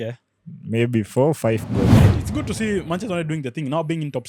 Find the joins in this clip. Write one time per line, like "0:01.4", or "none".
0:02.1